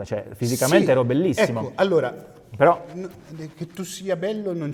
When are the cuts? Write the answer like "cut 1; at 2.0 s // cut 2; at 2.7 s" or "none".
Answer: none